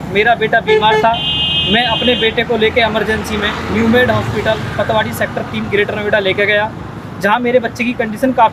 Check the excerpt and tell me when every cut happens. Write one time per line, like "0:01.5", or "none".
none